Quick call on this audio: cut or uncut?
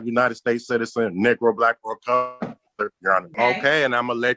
cut